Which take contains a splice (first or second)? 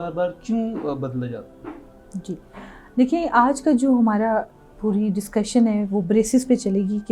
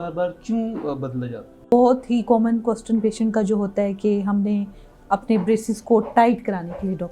second